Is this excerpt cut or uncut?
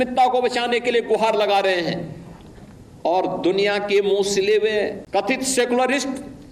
cut